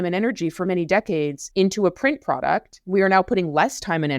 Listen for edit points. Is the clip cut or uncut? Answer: cut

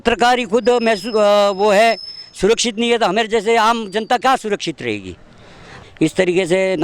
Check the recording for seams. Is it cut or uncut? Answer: cut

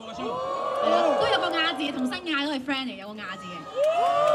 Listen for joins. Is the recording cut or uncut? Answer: uncut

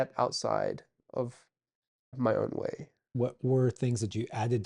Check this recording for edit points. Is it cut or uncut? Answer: cut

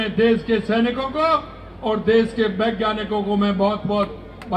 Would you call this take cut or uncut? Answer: uncut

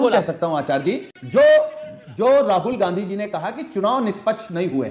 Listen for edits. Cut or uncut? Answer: uncut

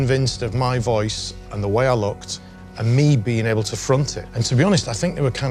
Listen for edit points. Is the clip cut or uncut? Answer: uncut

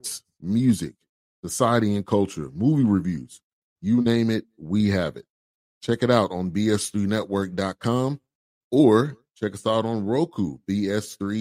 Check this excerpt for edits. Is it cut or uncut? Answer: uncut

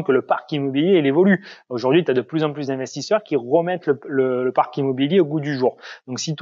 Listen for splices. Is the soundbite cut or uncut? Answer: uncut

